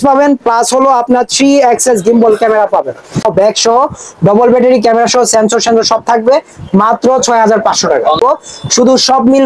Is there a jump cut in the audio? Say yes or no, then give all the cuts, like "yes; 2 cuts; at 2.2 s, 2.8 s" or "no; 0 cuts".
yes; 2 cuts; at 3.3 s, 8.2 s